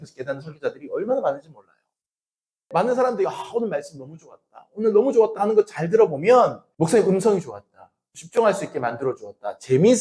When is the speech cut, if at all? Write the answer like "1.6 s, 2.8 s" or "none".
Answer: 2.6 s, 6.6 s, 8.2 s

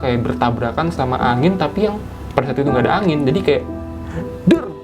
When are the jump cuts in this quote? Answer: 0.9 s, 2.1 s

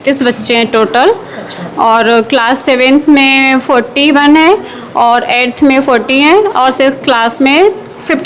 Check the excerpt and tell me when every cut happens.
none

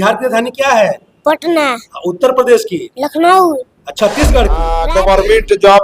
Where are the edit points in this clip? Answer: 4.8 s

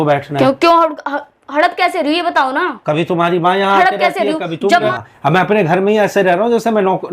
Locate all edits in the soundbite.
4.9 s

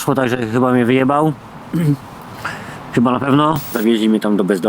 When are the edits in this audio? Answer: 3.8 s

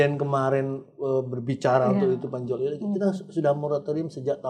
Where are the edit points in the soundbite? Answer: none

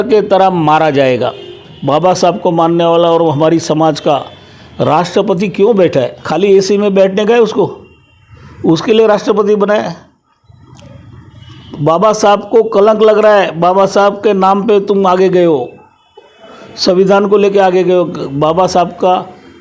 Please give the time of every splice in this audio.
1.7 s, 6.2 s

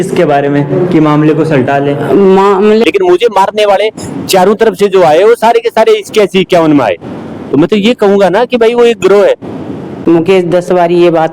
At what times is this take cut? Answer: 2.8 s, 10.0 s

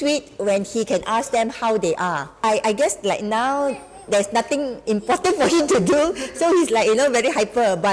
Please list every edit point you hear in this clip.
2.4 s

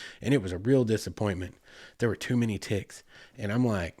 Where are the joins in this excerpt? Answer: none

